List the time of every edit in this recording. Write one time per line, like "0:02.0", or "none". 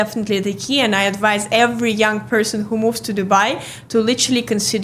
none